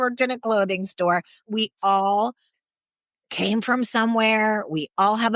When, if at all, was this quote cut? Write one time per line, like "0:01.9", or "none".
0:01.4

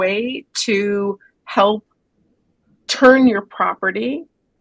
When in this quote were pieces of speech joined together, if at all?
none

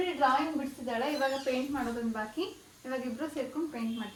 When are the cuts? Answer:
none

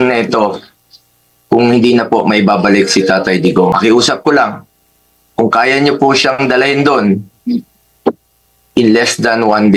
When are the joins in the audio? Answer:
0:03.7

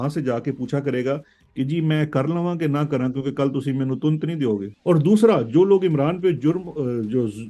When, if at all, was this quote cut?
0:04.7

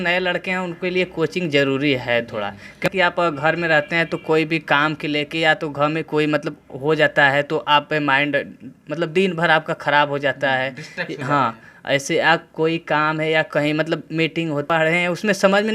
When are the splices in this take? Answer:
0:02.8
0:14.7

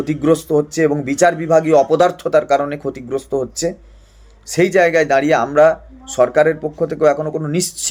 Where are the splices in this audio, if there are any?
none

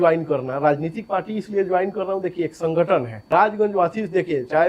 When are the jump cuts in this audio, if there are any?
0:03.4

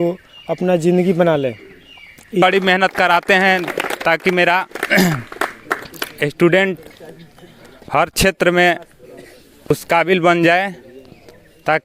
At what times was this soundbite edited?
0:02.4
0:09.7

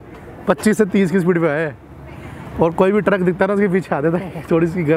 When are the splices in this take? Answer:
none

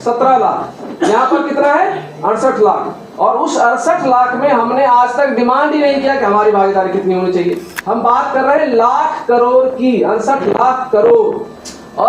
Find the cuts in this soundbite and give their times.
0:07.7

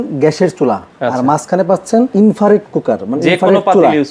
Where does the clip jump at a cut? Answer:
0:00.8
0:02.1

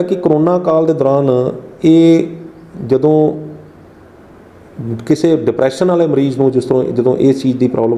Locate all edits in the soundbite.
none

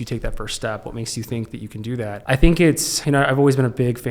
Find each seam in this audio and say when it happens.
0:02.2
0:02.9

